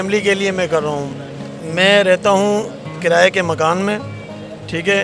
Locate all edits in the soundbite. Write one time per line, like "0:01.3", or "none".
none

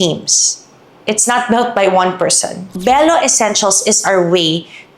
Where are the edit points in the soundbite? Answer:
0:02.7

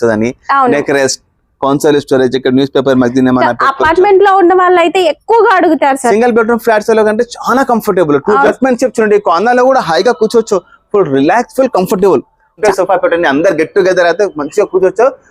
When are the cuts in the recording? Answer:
0:08.5
0:12.6

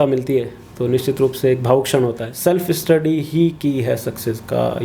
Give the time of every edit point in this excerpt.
0:02.3

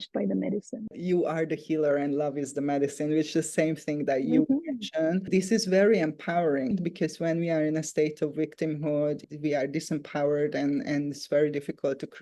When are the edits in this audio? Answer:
0:00.9
0:05.3
0:06.7

